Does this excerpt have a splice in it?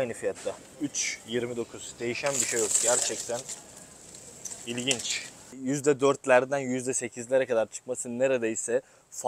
yes; 1 cut; at 5.4 s

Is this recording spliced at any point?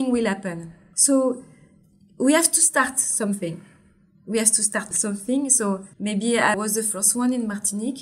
yes; 1 cut; at 4.9 s

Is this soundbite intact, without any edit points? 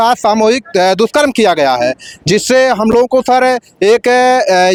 yes; 0 cuts

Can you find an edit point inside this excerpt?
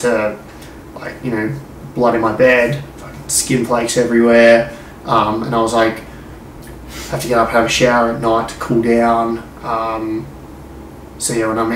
no; 0 cuts

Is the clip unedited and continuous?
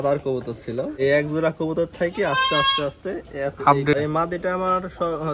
no; 2 cuts; at 0.9 s, 4.0 s

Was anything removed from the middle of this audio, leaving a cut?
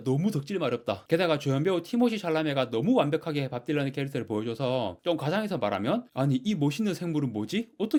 no; 0 cuts

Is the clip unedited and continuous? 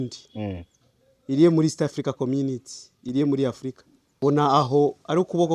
no; 1 cut; at 4.1 s

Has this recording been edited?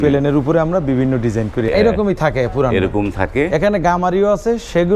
yes; 1 cut; at 1.7 s

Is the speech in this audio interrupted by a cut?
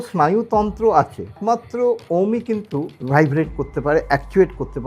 yes; 2 cuts; at 1.4 s, 3.0 s

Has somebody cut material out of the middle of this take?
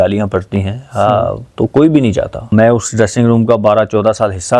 yes; 1 cut; at 2.4 s

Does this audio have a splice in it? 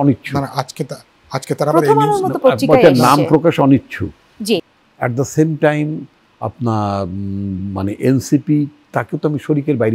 yes; 1 cut; at 4.7 s

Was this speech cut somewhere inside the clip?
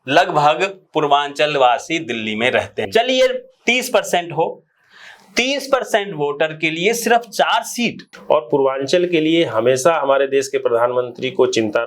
yes; 2 cuts; at 2.8 s, 8.1 s

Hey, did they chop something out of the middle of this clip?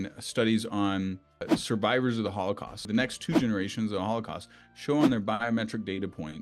yes; 2 cuts; at 1.5 s, 2.9 s

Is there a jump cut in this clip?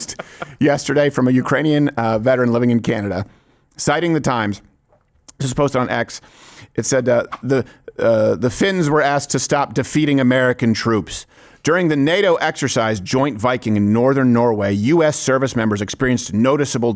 no; 0 cuts

